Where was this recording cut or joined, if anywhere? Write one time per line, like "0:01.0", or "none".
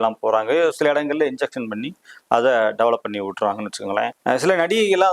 0:04.2